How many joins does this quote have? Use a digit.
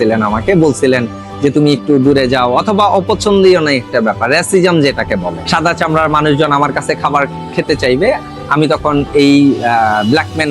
1